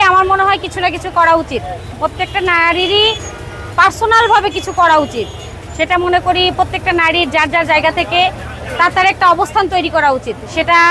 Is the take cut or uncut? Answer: uncut